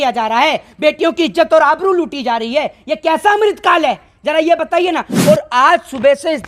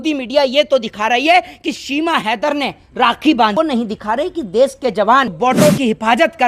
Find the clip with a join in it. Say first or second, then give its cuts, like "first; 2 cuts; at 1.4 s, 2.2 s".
second; 2 cuts; at 3.5 s, 5.3 s